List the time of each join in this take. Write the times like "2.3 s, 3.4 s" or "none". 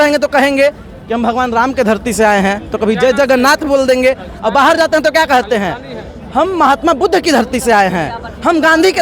none